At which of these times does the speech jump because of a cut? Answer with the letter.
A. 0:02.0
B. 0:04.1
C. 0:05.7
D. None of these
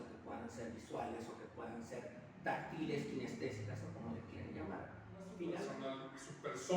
C